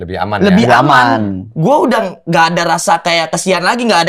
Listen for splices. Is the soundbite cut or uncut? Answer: uncut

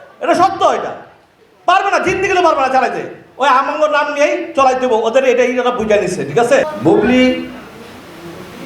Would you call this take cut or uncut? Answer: cut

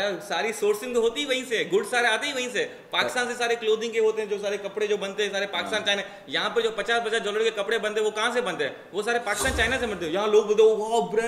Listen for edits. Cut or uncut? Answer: uncut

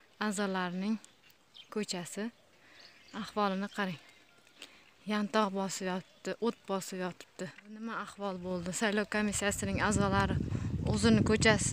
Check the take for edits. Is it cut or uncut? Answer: cut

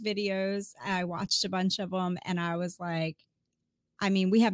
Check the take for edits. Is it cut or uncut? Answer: uncut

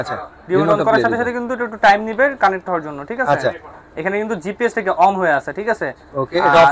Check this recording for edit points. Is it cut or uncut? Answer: uncut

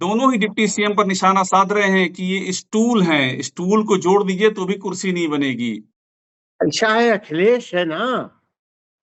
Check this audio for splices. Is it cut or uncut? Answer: uncut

